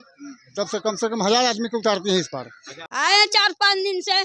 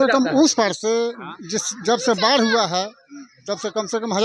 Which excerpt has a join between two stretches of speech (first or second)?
first